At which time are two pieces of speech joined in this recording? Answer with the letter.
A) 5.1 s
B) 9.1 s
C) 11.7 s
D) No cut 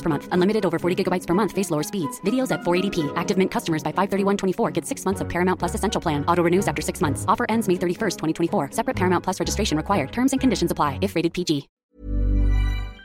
C